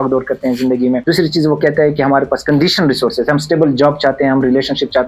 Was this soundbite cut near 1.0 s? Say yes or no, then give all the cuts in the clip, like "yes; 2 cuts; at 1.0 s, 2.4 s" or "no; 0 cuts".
yes; 1 cut; at 1.0 s